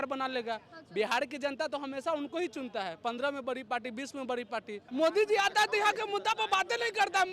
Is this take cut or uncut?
cut